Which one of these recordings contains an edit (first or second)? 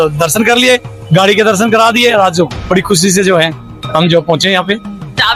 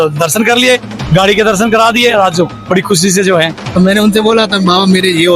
second